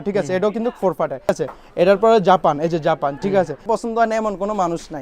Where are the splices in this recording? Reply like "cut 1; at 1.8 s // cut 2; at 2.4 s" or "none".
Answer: cut 1; at 1.3 s // cut 2; at 3.7 s